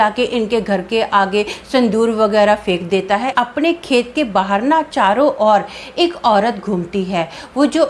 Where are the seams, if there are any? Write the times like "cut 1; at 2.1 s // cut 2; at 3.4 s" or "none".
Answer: cut 1; at 3.3 s

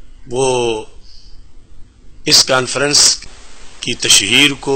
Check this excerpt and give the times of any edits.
cut 1; at 3.2 s

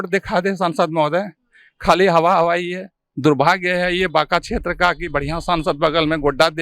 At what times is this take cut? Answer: cut 1; at 3.0 s

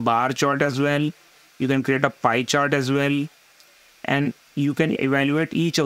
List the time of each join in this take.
cut 1; at 5.0 s

